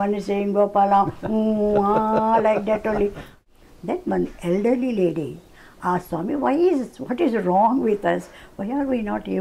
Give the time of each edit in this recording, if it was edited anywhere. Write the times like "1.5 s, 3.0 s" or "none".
3.3 s